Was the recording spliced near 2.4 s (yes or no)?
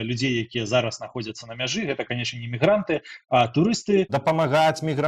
no